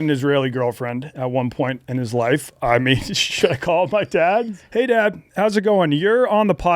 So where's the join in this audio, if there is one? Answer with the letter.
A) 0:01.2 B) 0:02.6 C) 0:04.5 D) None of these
C